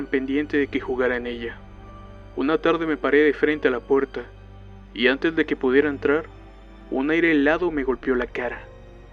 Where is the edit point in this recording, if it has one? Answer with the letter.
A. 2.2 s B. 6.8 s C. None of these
A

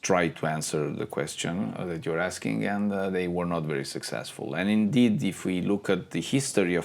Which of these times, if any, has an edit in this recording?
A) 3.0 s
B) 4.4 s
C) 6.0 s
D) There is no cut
D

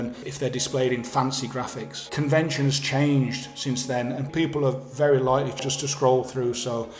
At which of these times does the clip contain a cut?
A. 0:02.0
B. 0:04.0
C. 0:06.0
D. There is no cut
A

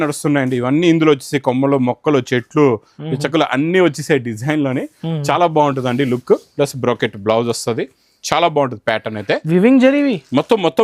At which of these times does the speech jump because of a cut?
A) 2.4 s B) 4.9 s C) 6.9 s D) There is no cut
D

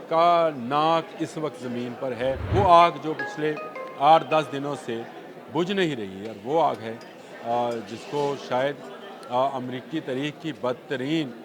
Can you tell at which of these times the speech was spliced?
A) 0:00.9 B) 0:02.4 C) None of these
B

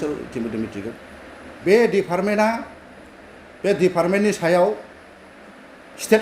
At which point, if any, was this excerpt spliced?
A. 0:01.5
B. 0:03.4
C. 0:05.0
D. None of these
A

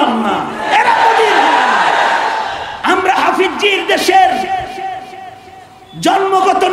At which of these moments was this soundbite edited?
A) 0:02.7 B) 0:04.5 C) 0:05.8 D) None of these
A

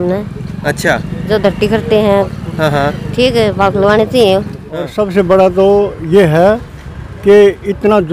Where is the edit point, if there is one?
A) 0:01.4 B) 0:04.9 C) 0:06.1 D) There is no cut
B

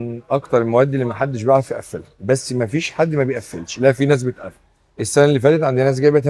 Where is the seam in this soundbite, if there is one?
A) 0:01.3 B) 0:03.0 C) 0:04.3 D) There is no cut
D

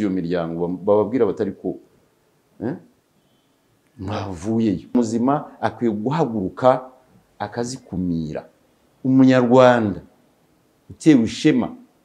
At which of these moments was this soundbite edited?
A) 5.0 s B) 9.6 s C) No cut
A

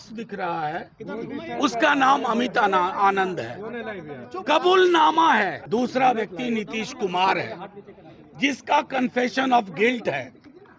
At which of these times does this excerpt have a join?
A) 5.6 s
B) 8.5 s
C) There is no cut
A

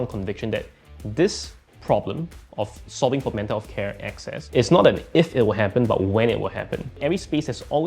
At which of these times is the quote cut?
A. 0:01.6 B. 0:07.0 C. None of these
B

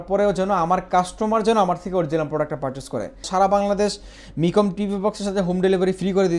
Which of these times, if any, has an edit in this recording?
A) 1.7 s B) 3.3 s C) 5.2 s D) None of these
B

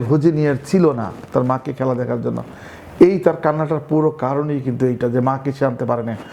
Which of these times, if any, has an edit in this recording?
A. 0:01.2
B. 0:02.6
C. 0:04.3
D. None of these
D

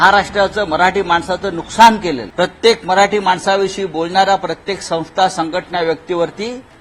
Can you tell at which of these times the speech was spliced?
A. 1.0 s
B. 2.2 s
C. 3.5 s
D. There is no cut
B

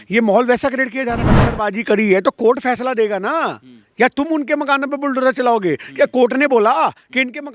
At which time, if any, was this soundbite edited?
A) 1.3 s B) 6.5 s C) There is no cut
A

